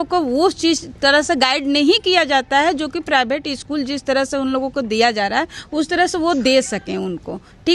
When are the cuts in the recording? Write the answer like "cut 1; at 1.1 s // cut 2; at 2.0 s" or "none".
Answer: none